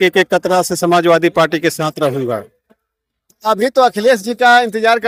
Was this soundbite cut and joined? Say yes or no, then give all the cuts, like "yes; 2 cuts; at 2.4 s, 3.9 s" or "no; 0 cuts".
no; 0 cuts